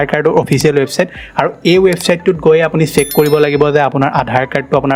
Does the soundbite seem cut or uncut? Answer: uncut